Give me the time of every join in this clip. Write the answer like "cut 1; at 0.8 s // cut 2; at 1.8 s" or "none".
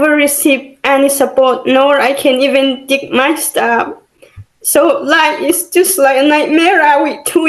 none